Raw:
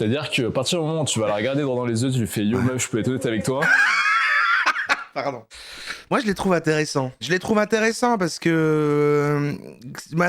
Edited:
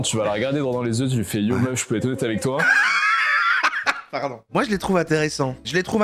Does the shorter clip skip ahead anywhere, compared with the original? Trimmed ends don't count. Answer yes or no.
yes